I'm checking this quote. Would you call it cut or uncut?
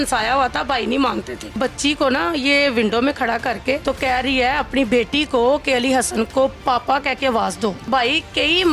cut